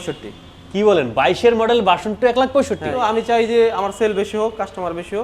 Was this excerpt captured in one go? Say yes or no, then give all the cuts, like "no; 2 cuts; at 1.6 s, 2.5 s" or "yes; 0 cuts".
no; 1 cut; at 3.0 s